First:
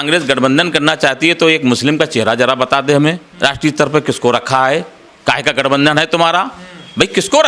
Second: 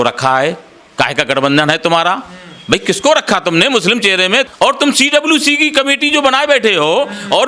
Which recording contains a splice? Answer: second; 1 cut; at 4.5 s

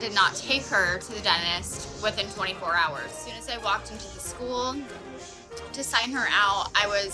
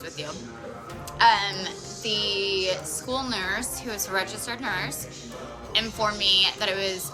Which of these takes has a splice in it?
first; 1 cut; at 3.2 s

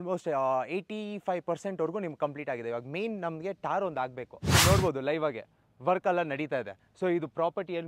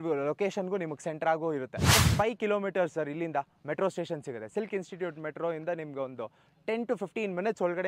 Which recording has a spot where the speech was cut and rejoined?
first; 1 cut; at 4.4 s

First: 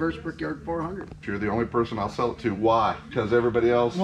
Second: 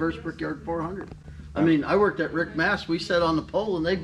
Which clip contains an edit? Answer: first; 2 cuts; at 1.2 s, 3.0 s

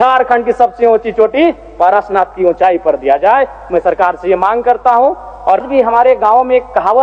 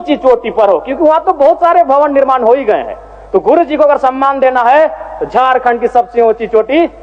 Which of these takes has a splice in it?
first; 1 cut; at 5.6 s

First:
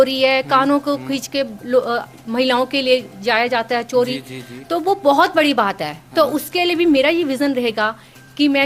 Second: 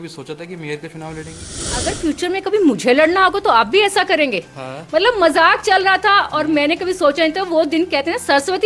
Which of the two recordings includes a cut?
second; 1 cut; at 1.9 s

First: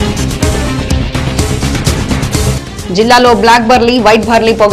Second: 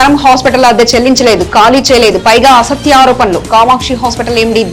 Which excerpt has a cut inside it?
first; 1 cut; at 2.6 s

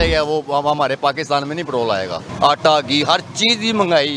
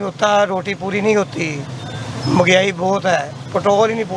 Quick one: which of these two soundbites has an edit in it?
first; 1 cut; at 2.2 s

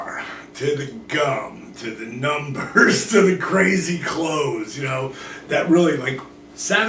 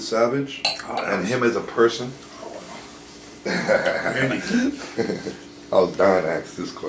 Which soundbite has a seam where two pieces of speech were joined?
first; 1 cut; at 4.0 s

